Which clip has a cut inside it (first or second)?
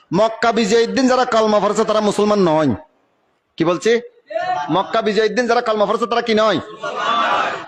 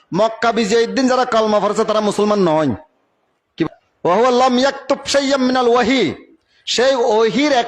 second